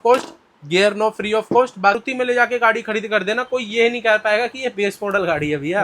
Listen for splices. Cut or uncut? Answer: cut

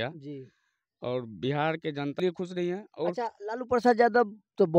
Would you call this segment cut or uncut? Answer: cut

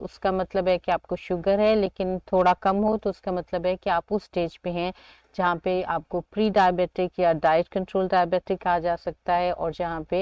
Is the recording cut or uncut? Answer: uncut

